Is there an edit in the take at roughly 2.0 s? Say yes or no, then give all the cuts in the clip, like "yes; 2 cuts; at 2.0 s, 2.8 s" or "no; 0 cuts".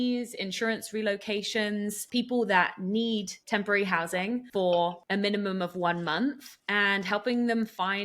yes; 5 cuts; at 2.0 s, 3.4 s, 4.5 s, 5.0 s, 6.5 s